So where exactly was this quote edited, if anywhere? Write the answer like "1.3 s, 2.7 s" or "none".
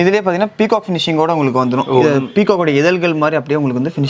none